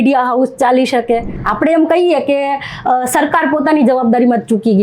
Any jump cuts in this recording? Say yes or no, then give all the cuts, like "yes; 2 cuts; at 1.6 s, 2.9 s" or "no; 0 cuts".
yes; 1 cut; at 1.4 s